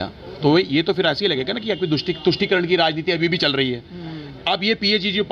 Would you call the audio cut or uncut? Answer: uncut